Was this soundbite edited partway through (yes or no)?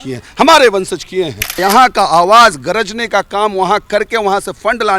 yes